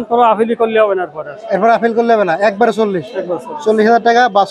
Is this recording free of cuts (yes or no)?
yes